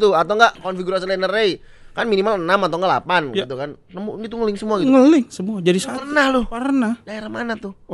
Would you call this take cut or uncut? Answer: uncut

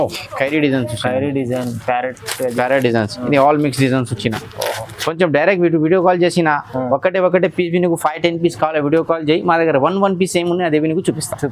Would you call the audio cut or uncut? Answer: uncut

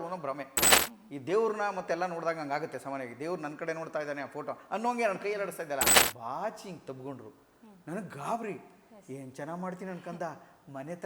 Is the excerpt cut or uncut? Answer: cut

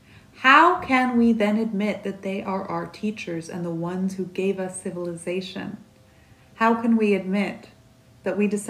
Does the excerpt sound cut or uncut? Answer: uncut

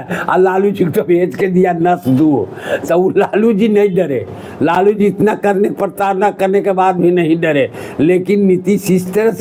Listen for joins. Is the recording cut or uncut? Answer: uncut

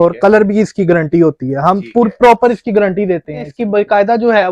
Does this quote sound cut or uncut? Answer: cut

